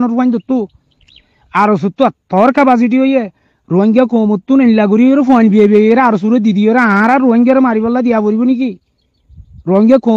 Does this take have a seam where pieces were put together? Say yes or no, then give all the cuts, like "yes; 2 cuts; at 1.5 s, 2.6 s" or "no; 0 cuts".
no; 0 cuts